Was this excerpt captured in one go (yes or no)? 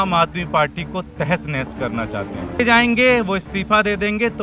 no